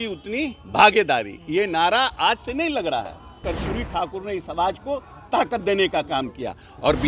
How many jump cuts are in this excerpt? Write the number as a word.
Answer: one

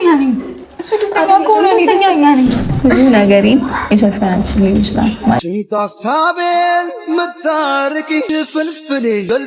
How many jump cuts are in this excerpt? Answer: one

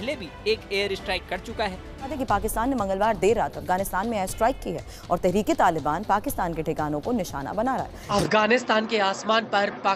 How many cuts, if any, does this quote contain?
two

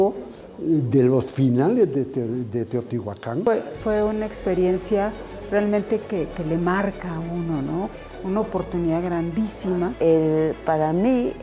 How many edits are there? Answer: three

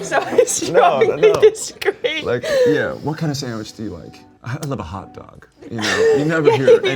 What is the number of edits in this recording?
zero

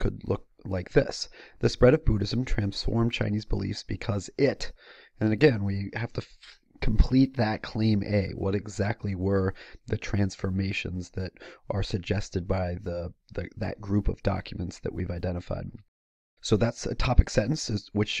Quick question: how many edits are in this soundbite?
one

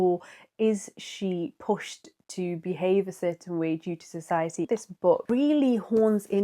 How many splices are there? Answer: one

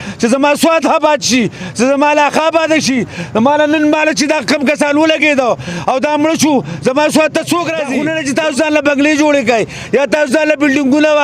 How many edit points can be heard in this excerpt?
one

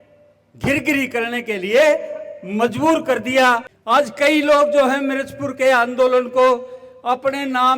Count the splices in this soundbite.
one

